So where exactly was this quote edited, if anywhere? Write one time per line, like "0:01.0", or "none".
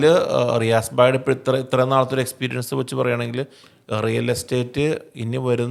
none